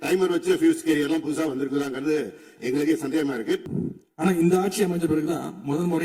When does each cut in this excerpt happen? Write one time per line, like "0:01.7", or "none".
0:03.7